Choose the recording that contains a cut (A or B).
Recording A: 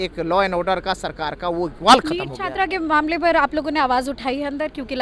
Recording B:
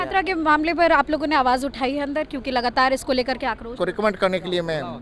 B